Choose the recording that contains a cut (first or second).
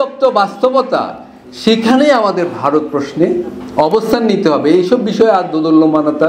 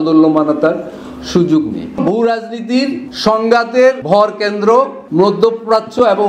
second